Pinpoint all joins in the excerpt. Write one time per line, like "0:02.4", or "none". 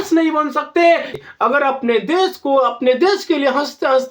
0:01.1